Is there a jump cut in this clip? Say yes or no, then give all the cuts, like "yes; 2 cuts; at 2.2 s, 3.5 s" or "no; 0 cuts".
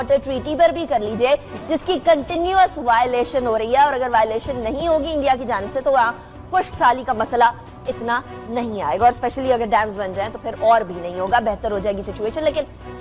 no; 0 cuts